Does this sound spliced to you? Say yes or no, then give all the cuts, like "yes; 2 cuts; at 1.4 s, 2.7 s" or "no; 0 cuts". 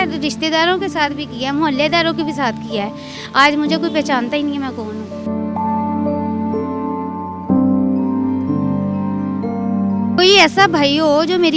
yes; 1 cut; at 10.2 s